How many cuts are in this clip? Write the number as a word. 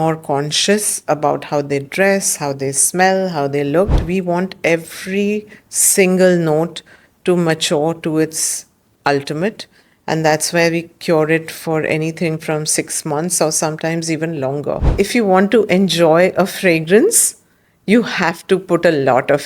two